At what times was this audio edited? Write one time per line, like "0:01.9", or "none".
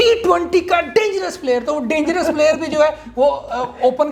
none